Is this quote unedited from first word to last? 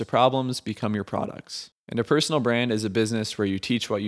no; 1 cut; at 1.7 s

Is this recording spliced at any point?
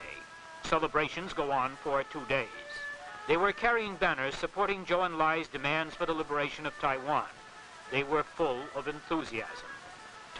yes; 1 cut; at 7.7 s

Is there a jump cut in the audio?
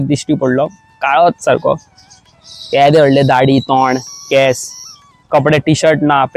no; 0 cuts

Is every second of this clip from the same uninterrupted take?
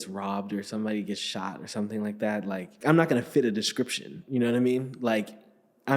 no; 1 cut; at 2.8 s

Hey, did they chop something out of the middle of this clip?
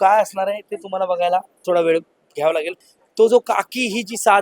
yes; 1 cut; at 2.7 s

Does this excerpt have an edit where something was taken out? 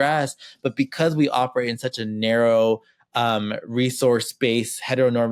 no; 0 cuts

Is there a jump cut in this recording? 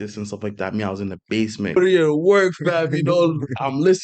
yes; 1 cut; at 1.8 s

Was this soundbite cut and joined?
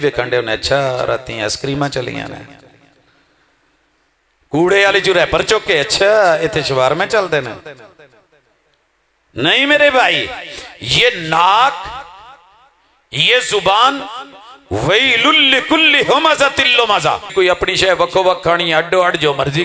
yes; 1 cut; at 17.2 s

